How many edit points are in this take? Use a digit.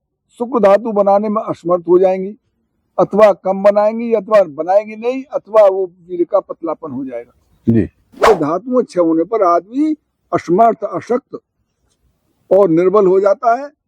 1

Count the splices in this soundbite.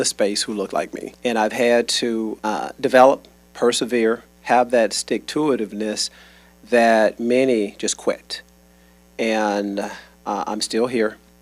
2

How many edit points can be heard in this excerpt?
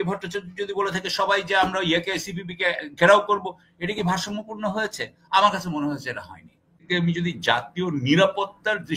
1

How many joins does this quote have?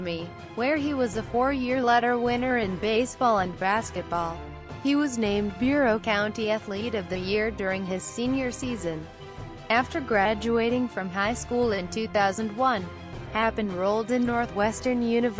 1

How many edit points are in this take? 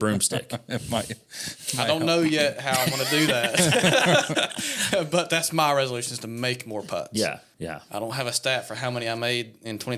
1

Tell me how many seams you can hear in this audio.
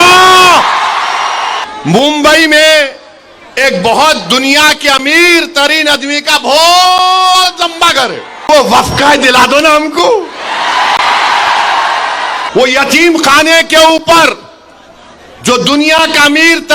3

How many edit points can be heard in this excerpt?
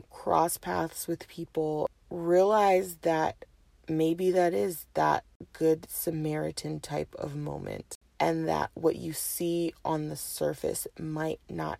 3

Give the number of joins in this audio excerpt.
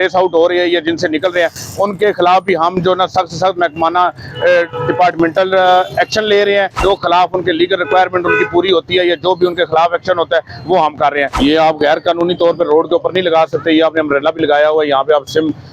2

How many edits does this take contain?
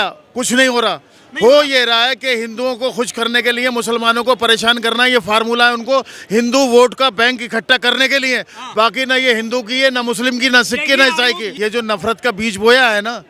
1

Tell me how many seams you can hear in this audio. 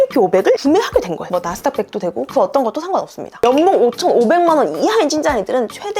1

